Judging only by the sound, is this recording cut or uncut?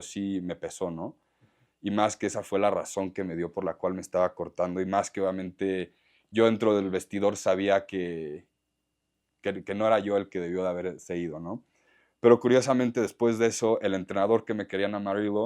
uncut